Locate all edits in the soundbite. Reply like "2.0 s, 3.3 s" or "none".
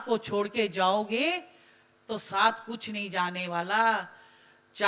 none